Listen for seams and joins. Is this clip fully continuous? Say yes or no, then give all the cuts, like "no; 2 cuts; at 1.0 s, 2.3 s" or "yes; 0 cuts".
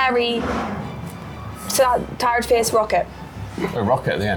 yes; 0 cuts